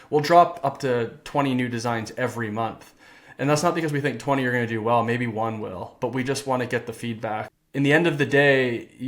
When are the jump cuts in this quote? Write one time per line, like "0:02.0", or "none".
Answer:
0:07.5

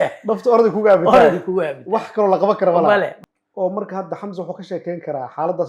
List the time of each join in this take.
0:03.1

